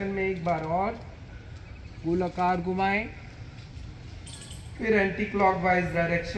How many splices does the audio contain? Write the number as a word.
zero